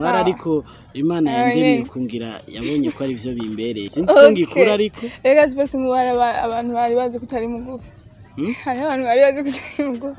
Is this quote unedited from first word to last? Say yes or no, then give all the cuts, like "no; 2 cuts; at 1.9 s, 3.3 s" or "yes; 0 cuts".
no; 1 cut; at 3.9 s